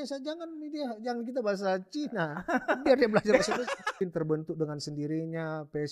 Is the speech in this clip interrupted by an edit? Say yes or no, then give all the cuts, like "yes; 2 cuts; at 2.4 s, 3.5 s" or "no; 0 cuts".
yes; 1 cut; at 3.9 s